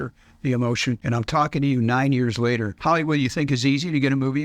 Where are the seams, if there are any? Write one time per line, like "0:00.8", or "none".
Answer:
0:01.0
0:02.7